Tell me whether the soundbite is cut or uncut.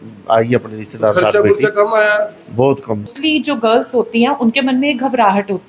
cut